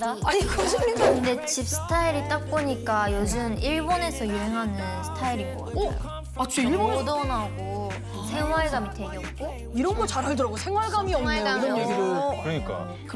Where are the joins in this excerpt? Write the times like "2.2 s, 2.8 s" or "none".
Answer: 1.1 s